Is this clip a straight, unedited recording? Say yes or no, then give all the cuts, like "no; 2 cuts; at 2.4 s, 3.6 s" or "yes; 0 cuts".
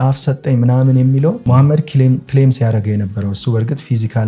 no; 1 cut; at 1.4 s